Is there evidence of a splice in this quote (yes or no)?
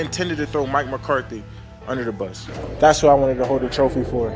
yes